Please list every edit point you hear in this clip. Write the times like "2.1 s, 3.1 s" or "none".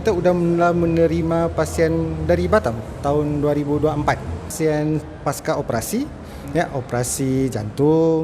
4.5 s